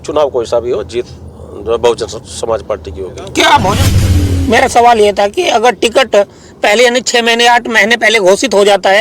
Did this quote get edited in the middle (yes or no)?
yes